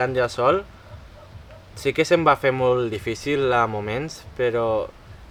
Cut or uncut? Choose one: uncut